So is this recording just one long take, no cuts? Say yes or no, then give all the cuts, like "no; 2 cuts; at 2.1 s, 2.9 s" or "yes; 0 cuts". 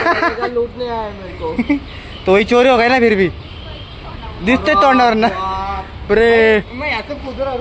yes; 0 cuts